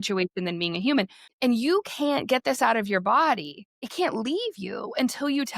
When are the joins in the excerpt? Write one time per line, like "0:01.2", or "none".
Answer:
0:01.2
0:03.9